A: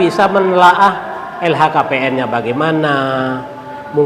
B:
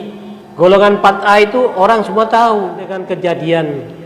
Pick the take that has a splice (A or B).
B